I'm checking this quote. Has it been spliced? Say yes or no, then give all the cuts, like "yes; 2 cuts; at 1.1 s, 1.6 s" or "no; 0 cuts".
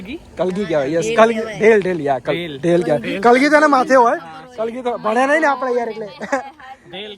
no; 0 cuts